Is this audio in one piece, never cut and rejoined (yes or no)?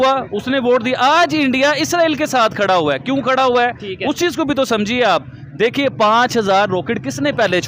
yes